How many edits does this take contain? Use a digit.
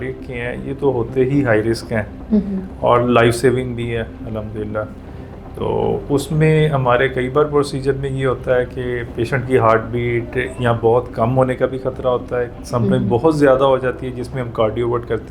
0